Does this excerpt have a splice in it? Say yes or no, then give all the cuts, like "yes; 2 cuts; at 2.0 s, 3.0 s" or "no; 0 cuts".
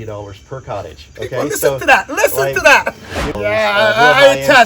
yes; 1 cut; at 3.3 s